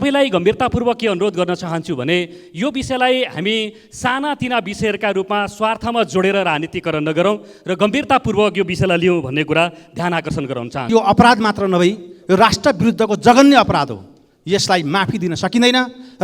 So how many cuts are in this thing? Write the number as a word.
one